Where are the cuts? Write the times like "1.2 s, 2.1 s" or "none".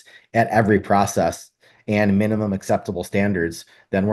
none